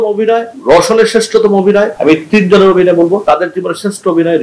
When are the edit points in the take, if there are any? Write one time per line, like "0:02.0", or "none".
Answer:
none